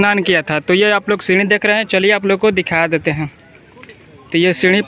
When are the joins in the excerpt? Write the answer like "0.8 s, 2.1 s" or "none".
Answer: none